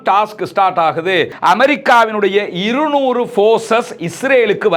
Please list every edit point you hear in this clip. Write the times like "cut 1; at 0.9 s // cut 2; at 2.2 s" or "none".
cut 1; at 1.3 s